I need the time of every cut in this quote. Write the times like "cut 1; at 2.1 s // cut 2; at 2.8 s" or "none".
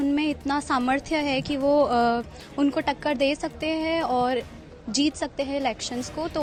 none